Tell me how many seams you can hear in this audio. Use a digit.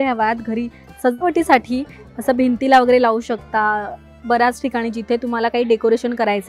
0